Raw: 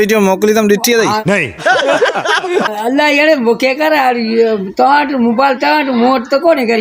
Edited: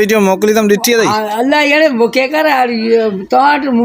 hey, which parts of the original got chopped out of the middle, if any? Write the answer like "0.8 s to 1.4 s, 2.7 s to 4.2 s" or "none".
1.2 s to 2.7 s

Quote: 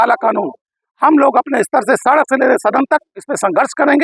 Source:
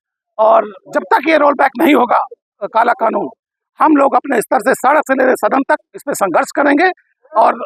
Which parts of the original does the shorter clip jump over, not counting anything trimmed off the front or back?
none

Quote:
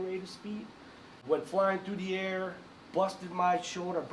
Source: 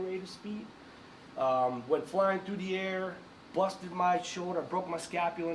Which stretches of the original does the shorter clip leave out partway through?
1.2 s to 1.8 s

